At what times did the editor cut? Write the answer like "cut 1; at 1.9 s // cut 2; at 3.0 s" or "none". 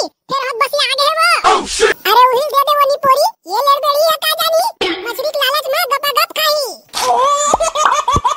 cut 1; at 6.8 s